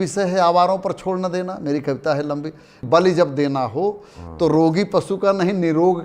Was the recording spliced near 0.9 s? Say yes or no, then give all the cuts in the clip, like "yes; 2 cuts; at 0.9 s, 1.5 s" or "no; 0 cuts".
no; 1 cut; at 2.8 s